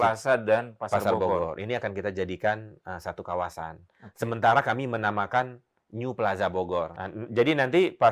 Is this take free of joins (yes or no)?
no